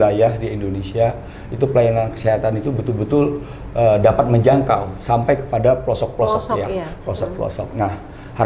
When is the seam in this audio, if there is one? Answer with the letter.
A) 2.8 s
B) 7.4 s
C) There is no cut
C